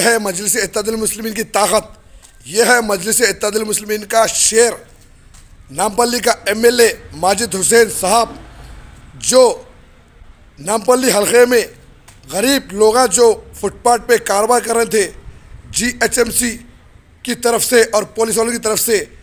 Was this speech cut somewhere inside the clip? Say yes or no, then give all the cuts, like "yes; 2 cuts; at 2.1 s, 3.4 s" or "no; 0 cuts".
no; 0 cuts